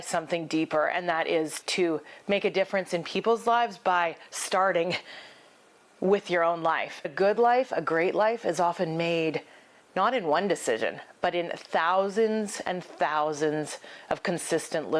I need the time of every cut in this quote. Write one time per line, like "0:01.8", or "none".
0:01.6
0:07.1

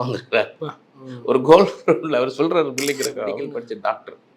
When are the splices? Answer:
0:03.4

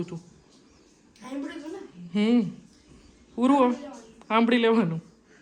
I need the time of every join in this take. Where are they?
none

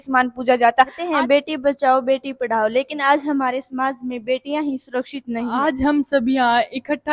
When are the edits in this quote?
0:01.0
0:05.6

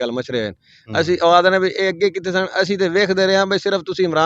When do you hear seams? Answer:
none

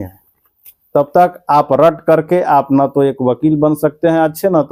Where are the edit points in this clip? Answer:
none

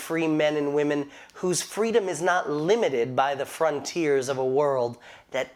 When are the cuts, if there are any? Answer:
none

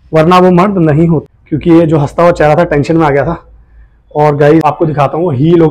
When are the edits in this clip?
0:01.3
0:04.6

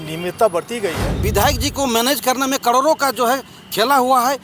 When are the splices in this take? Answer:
0:01.0

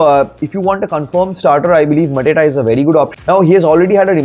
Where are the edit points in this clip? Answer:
0:03.2

